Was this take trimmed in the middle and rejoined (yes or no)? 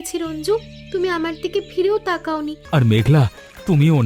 yes